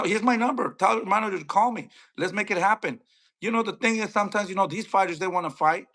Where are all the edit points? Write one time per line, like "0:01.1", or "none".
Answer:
none